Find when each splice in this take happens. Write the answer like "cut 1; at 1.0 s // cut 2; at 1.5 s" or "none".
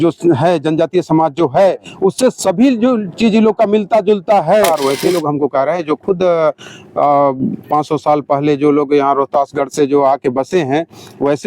cut 1; at 4.7 s